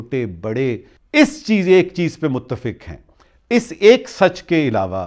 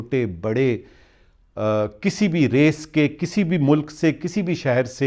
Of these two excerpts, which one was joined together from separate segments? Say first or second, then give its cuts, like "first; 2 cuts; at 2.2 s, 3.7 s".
first; 1 cut; at 0.9 s